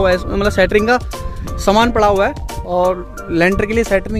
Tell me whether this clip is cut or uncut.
uncut